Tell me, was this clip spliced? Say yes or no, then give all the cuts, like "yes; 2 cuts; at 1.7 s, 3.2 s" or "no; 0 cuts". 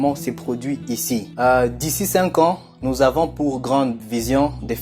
yes; 1 cut; at 1.3 s